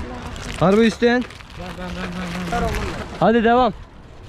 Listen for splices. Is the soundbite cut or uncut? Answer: cut